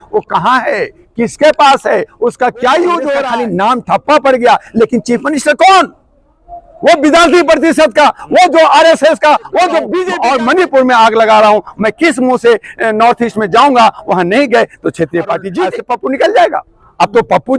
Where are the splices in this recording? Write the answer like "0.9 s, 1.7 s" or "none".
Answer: 3.3 s, 10.0 s, 15.8 s